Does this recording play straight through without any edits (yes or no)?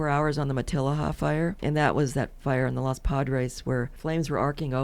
no